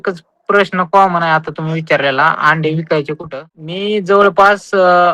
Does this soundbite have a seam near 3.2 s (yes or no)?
yes